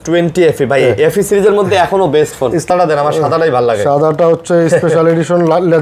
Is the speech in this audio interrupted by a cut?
yes; 1 cut; at 2.7 s

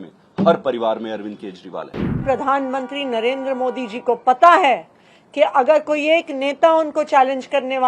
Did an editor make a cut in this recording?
yes; 1 cut; at 2.0 s

